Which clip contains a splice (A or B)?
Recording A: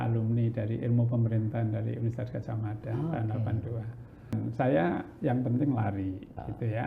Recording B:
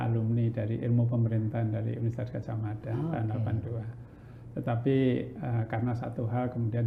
A